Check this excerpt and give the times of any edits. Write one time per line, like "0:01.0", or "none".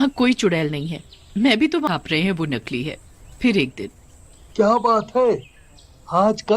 0:01.9